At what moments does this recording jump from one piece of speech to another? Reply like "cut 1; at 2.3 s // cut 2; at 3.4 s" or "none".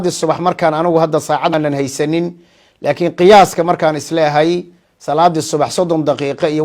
cut 1; at 1.5 s